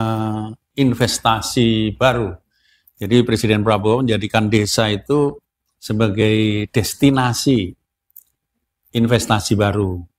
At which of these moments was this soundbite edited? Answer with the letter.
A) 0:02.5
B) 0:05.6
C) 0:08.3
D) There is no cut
D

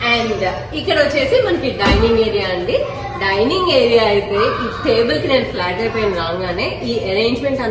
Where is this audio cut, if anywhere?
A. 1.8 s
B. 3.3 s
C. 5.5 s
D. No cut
D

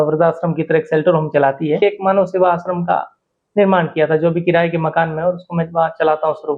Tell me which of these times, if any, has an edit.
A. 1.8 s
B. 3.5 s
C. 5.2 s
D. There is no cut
A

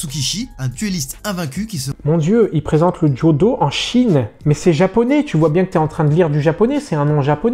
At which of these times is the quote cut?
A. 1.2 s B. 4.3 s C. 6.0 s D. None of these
B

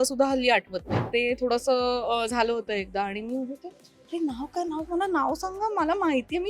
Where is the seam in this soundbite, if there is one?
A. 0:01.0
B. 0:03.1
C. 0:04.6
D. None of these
A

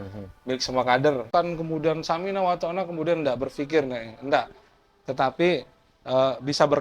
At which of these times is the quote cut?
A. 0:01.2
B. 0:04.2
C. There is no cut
A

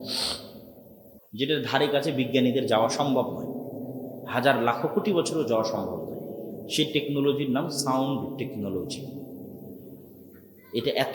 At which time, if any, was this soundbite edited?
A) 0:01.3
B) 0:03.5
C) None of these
A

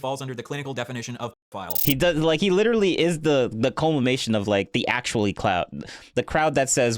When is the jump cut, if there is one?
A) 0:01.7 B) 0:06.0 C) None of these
A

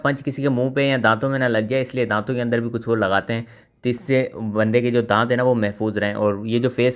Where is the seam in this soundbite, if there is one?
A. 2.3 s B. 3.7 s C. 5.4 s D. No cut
D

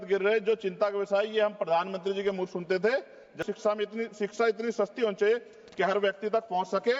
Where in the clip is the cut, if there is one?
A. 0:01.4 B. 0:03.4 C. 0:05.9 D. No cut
B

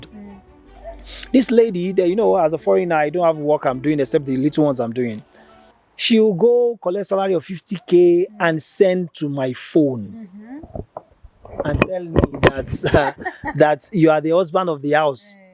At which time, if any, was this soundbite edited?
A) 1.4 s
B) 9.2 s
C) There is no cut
C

